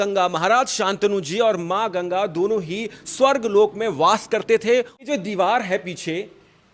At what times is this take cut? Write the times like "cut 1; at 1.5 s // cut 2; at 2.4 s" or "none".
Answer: cut 1; at 4.9 s